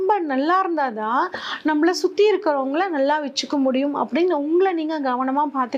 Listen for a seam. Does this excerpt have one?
no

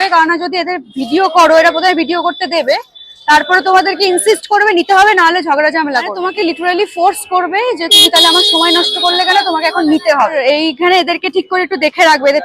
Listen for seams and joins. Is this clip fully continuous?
no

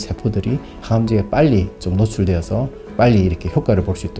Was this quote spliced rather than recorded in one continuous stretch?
no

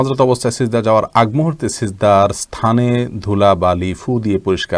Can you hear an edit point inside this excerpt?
no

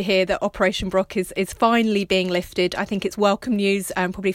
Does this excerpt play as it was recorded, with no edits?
yes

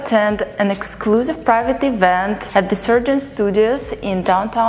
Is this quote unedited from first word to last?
yes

